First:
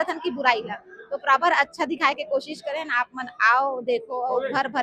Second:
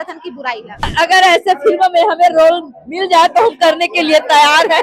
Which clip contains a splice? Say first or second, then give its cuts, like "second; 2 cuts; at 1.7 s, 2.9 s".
second; 1 cut; at 0.9 s